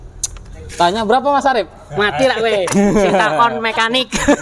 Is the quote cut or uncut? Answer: uncut